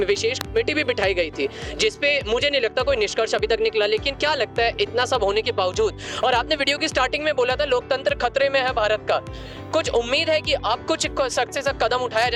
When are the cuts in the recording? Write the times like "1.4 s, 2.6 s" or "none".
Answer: none

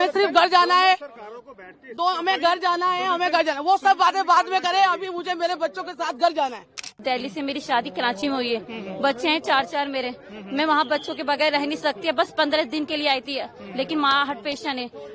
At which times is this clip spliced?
7.0 s

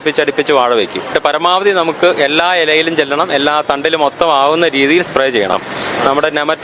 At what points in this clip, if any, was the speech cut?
1.1 s, 5.6 s

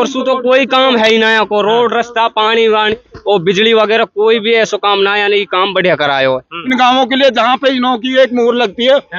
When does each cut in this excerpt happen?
6.5 s

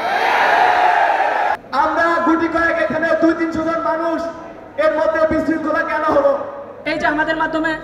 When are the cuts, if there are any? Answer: 1.6 s, 6.7 s

